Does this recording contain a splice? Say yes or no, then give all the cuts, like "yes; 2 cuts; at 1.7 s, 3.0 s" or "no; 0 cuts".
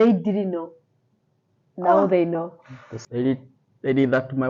yes; 1 cut; at 3.0 s